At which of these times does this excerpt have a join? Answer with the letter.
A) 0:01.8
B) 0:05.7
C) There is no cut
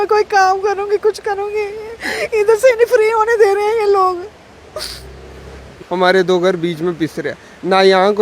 B